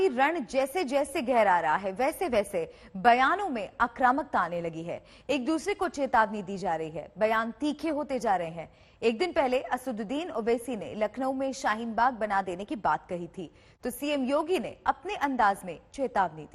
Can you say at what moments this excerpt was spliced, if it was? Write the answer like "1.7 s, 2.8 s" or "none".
none